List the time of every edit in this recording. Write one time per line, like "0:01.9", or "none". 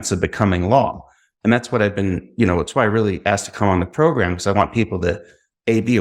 none